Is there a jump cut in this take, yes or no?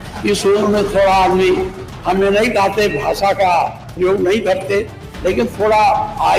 no